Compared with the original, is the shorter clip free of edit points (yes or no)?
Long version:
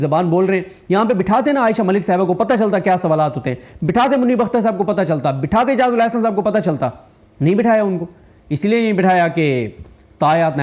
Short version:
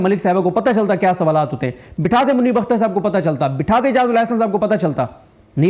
yes